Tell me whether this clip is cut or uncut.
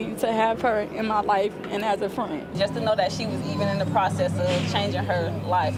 uncut